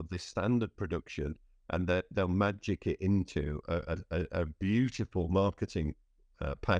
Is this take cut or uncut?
uncut